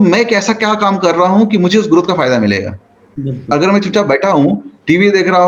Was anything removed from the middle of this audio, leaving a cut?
no; 0 cuts

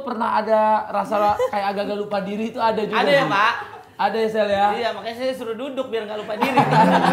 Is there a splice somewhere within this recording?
no; 0 cuts

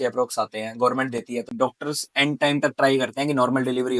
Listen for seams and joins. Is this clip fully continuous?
no; 1 cut; at 1.5 s

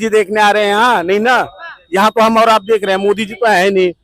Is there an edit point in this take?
no; 0 cuts

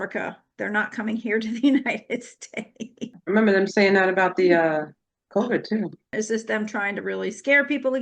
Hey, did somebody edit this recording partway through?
yes; 2 cuts; at 3.2 s, 6.1 s

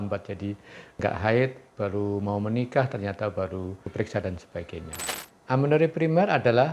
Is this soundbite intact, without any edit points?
no; 1 cut; at 5.0 s

